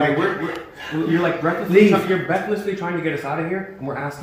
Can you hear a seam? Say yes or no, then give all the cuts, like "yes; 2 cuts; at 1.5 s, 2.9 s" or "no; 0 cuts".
no; 0 cuts